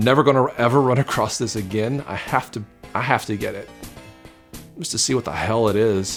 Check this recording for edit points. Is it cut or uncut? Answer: uncut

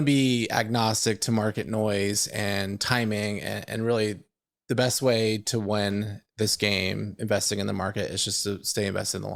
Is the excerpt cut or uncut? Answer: uncut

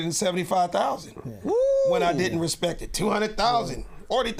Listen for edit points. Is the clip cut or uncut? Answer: uncut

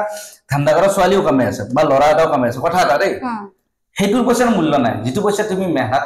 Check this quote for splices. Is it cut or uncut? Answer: uncut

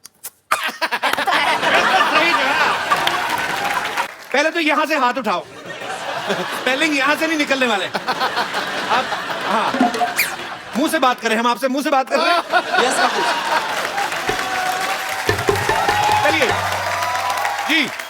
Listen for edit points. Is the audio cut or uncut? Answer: cut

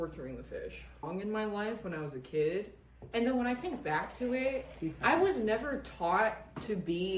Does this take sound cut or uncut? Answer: cut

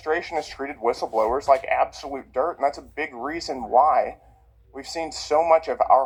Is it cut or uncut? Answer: uncut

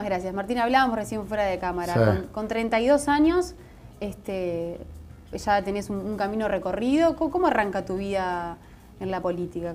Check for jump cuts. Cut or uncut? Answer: cut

